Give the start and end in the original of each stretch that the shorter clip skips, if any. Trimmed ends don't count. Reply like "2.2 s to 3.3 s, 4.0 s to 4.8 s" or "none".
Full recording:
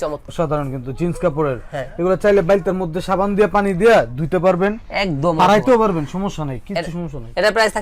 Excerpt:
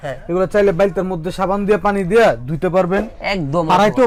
none